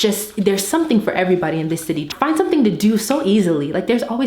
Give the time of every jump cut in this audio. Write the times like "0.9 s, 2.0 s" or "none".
2.1 s